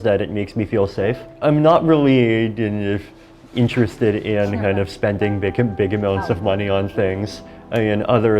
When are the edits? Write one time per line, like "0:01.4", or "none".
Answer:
0:01.3

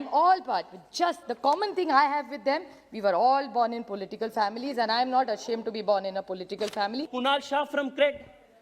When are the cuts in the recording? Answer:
0:07.1

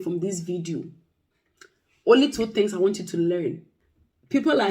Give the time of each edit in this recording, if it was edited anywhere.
0:03.7

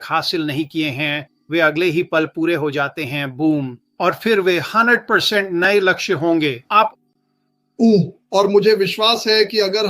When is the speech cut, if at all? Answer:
0:06.9

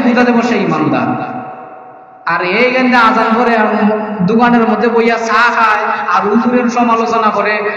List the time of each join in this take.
none

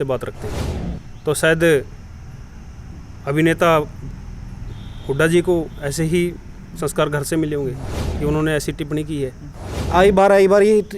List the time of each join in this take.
0:09.9

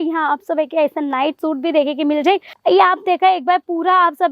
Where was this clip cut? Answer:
0:02.5

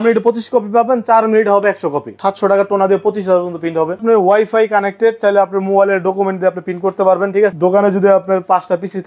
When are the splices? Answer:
0:02.1
0:04.0
0:07.5

